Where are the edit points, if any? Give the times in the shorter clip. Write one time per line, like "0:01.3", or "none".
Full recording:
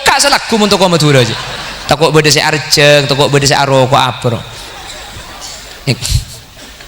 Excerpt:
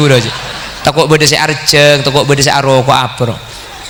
none